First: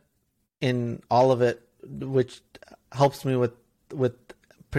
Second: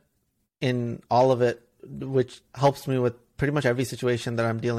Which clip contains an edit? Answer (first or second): second